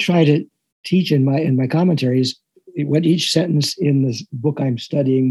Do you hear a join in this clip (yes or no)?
yes